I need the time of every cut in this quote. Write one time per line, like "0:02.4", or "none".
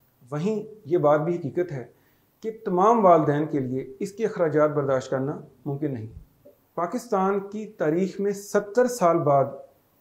0:06.6